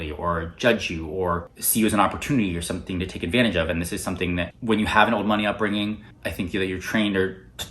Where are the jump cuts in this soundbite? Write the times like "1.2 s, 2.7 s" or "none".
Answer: 4.5 s